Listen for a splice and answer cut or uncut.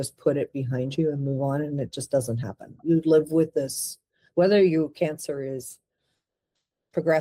uncut